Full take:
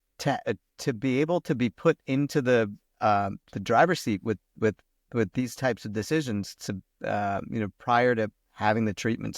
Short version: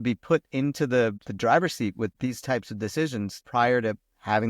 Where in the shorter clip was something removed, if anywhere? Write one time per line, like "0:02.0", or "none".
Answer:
0:01.2
0:02.2
0:03.4